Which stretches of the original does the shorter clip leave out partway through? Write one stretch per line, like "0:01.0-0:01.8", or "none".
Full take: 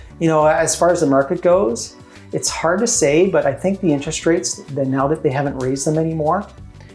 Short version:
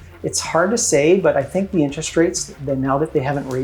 none

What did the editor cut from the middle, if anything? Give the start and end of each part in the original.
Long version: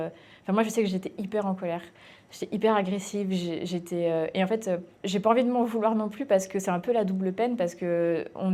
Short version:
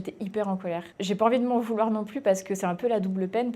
0:01.9-0:04.9

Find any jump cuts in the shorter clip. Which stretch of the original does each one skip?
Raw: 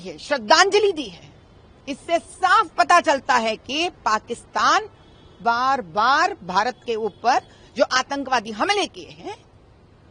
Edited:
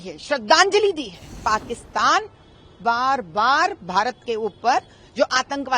0:01.4-0:04.0

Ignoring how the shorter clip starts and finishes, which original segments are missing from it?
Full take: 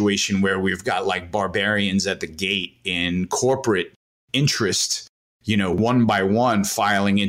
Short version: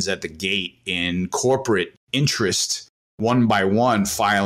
0:04.0-0:04.2
0:05.4-0:05.8

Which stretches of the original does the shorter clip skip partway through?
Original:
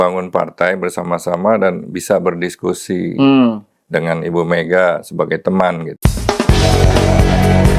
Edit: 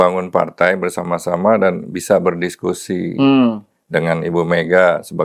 none

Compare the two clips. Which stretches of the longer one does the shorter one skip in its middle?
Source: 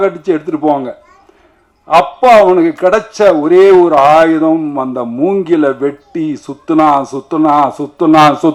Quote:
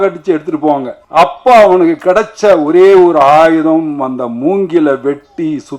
0:01.0-0:01.7

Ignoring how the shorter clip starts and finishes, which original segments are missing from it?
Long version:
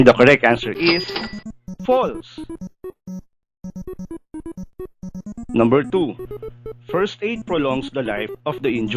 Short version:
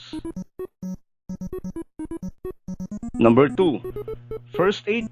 0:03.4-0:03.5

